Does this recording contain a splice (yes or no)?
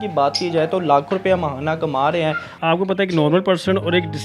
yes